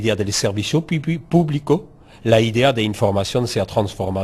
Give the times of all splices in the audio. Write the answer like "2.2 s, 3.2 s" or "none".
none